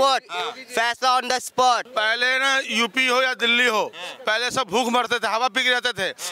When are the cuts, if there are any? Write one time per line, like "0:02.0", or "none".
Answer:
0:01.9